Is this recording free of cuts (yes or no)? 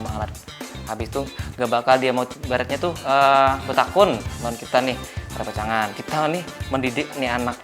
no